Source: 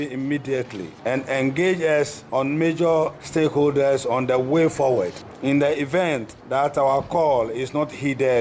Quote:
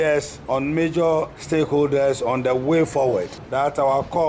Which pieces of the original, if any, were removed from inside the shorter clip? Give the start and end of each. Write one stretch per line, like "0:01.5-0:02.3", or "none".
0:05.2-0:06.4